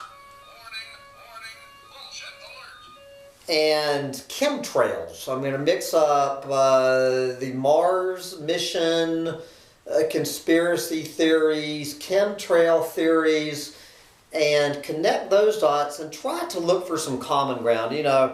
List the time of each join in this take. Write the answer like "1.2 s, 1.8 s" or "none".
11.9 s